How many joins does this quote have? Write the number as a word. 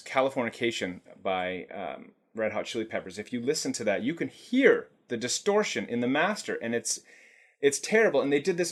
zero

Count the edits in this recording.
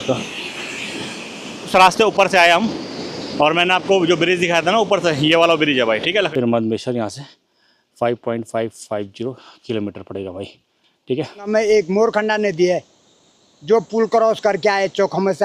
three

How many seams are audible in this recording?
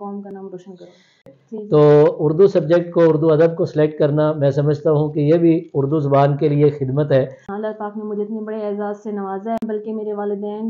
three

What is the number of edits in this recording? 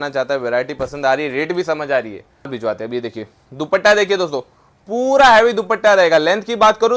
one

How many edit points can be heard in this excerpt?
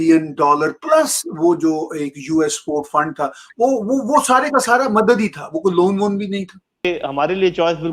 one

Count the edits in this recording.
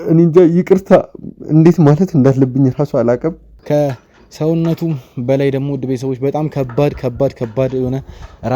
one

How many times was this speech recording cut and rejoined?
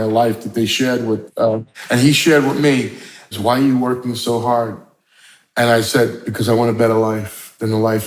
two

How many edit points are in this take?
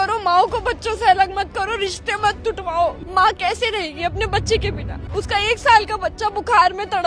one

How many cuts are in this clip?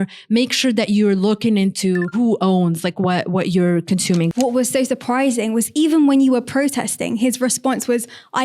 two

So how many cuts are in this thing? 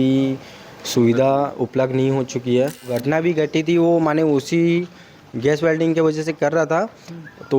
one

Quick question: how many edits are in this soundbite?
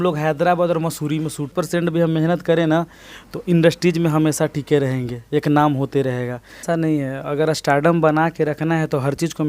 two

